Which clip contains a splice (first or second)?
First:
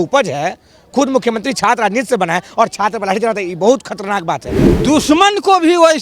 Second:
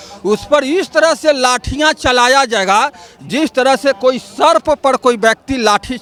first